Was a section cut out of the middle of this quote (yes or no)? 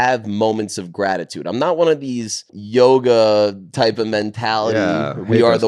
yes